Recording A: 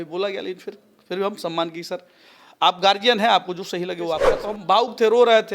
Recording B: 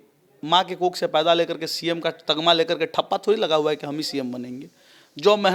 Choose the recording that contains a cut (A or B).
A